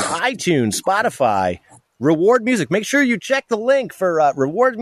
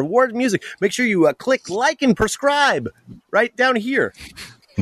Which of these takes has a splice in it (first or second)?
second